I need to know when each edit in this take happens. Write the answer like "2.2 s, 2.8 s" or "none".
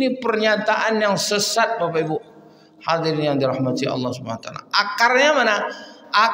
none